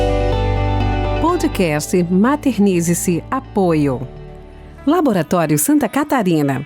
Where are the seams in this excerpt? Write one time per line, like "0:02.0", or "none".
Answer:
0:01.2